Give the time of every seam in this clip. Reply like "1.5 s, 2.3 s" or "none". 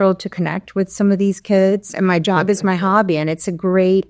1.9 s